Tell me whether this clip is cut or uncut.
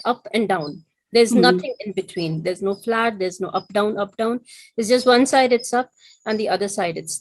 uncut